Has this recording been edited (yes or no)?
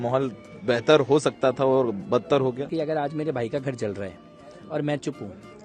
yes